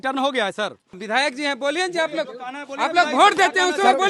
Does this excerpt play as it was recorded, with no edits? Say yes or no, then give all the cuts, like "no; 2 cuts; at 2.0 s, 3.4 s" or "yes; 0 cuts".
no; 1 cut; at 1.0 s